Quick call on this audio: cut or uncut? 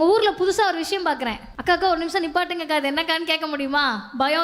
cut